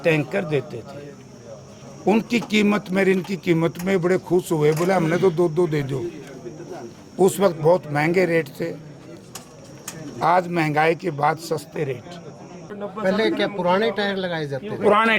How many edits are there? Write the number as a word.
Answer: one